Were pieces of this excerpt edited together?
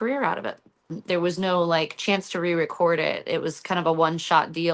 yes; 1 cut; at 0.9 s

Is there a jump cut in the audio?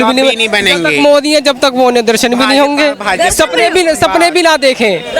no; 0 cuts

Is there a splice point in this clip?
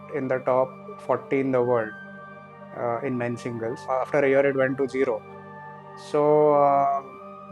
no; 0 cuts

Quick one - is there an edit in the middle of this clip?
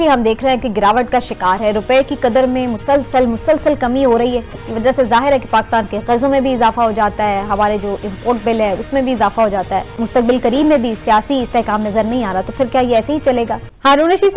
no; 0 cuts

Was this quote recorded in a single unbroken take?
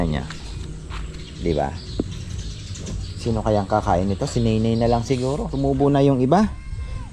no; 1 cut; at 5.5 s

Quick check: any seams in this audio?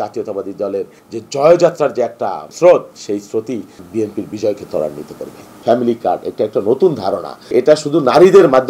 yes; 5 cuts; at 1.0 s, 2.4 s, 3.8 s, 5.6 s, 7.5 s

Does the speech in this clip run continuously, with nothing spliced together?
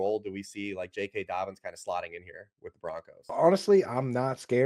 no; 1 cut; at 3.1 s

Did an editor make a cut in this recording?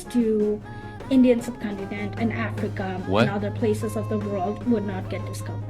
yes; 1 cut; at 2.9 s

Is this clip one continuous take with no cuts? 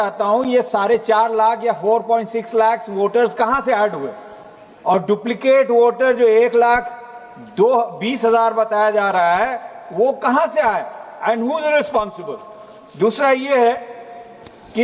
yes; 0 cuts

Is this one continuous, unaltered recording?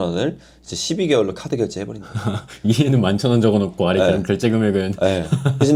yes; 0 cuts

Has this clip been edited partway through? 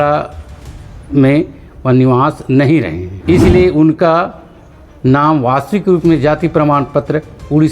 yes; 1 cut; at 3.0 s

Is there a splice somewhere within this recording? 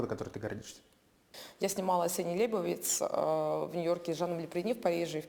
yes; 1 cut; at 1.3 s

